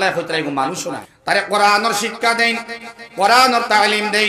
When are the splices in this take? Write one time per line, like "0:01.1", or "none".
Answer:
0:01.1